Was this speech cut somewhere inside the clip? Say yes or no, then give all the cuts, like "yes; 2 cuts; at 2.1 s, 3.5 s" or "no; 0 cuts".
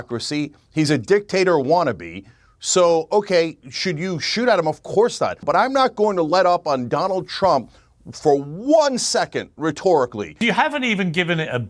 yes; 2 cuts; at 5.4 s, 10.3 s